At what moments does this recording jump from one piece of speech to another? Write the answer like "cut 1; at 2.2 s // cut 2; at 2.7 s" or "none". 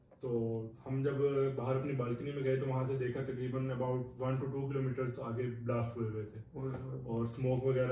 none